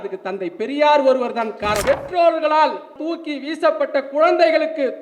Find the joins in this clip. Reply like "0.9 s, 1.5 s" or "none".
1.8 s, 3.0 s